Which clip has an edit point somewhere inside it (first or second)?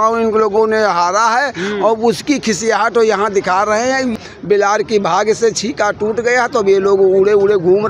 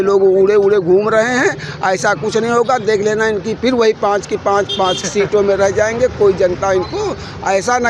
first